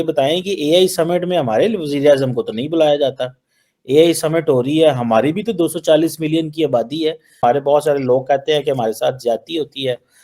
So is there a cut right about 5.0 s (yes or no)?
no